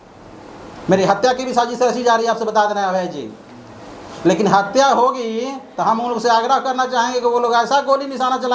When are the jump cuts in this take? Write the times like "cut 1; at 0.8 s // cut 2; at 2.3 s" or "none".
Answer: none